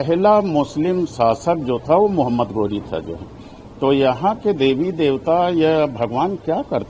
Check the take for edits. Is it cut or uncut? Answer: uncut